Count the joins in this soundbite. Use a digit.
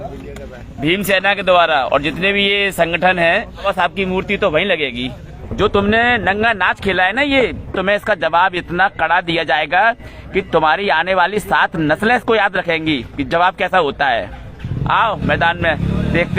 2